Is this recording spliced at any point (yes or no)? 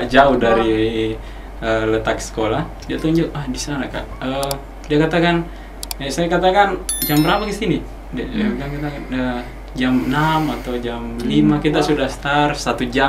no